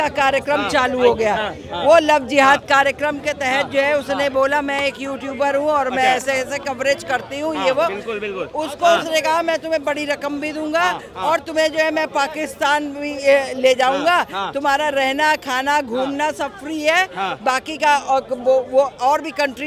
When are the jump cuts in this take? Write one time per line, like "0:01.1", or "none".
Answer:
none